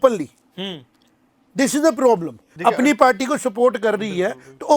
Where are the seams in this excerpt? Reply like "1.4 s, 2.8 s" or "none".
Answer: 2.5 s